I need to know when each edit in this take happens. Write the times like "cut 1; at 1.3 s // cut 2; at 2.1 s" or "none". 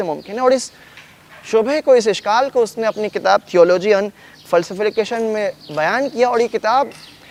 none